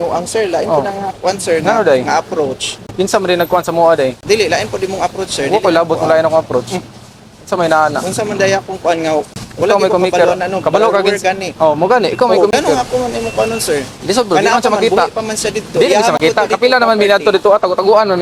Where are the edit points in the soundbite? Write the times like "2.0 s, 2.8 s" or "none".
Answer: none